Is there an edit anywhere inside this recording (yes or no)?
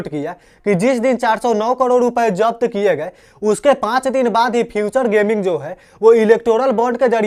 no